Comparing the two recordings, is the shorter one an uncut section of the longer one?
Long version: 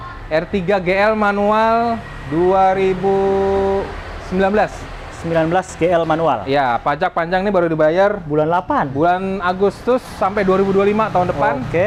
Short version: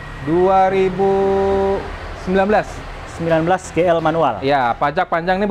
yes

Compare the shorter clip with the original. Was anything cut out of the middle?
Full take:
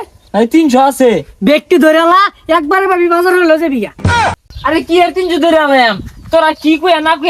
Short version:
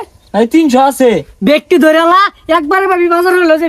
no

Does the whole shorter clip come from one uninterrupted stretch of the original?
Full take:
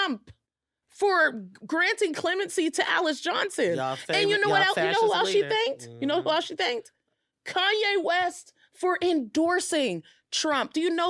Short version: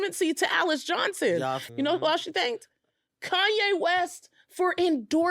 no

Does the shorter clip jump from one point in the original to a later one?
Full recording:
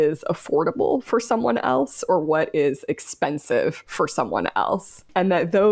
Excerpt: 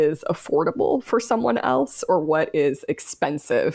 no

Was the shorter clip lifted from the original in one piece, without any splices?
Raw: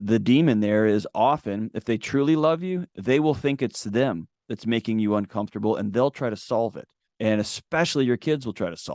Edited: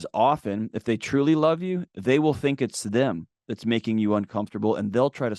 yes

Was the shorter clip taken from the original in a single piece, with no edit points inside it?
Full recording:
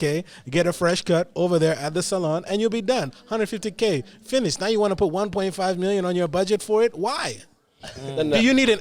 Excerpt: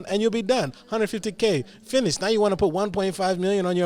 yes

